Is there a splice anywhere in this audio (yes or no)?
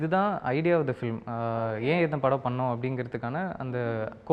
no